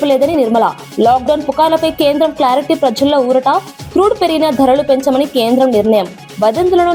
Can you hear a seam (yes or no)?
no